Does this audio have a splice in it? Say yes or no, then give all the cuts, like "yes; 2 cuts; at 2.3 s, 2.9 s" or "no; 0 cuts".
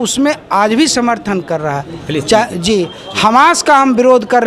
no; 0 cuts